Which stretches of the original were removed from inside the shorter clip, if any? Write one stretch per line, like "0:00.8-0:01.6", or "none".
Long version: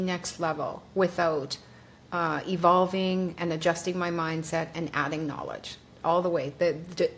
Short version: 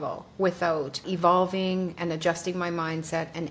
0:01.6-0:02.4